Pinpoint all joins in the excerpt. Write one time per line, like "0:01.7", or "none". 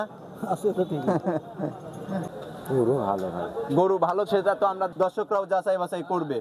0:02.2
0:04.9

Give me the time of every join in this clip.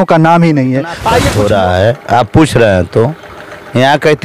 0:01.2

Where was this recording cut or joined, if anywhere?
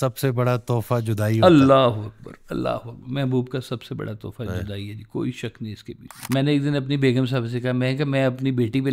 0:01.4
0:06.2

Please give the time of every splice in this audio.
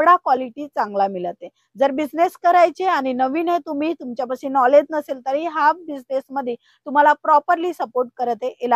none

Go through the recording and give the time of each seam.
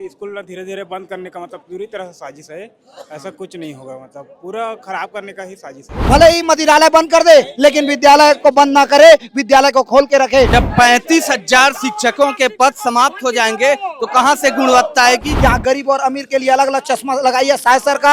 0:05.9
0:10.5
0:15.3

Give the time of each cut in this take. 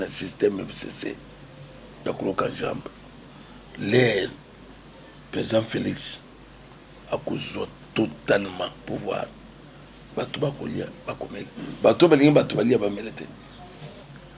none

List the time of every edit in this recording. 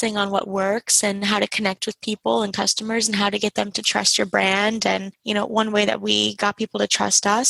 none

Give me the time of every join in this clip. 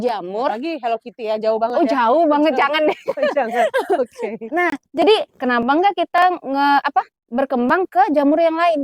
none

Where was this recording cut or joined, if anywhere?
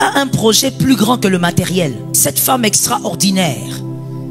0:02.1

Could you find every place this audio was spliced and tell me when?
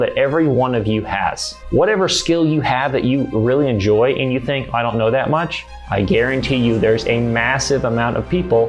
0:01.5

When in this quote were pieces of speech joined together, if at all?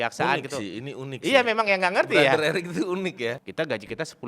0:03.3

